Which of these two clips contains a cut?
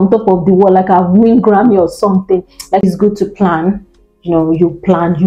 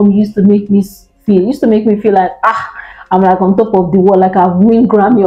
first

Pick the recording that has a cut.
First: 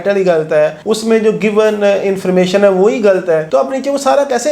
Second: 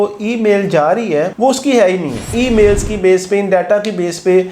second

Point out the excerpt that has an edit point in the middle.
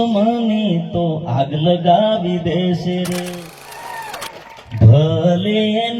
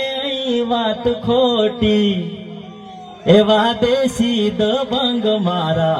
first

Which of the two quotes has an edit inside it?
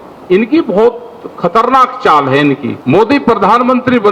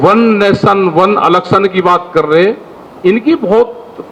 first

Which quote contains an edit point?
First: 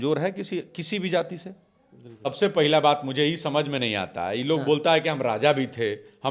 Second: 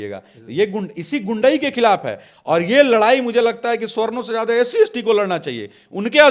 first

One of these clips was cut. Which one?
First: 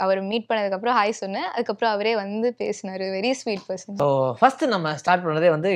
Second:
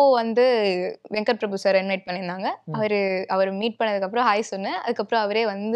first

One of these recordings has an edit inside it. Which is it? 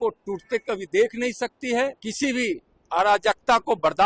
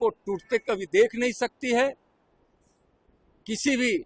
first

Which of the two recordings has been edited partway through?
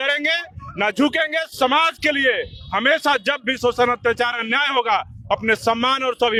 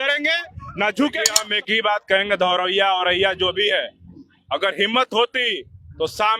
second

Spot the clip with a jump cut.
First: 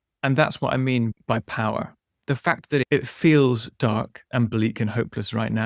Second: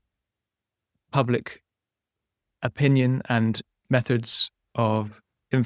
first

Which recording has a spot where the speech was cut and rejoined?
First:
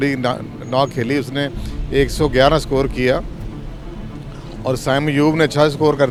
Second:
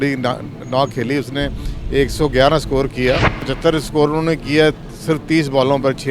second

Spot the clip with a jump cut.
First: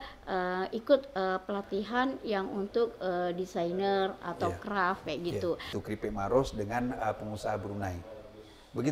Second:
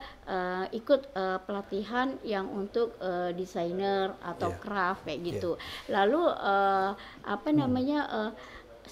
first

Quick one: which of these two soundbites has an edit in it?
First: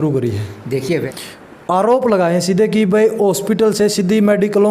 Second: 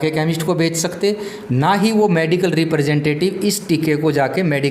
first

